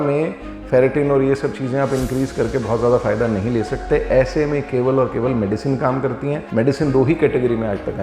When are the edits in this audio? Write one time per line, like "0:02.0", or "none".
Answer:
none